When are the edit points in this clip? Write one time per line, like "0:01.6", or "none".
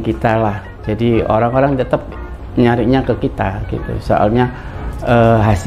none